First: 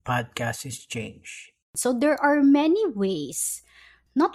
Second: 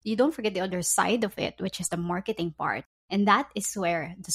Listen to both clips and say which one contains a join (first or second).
first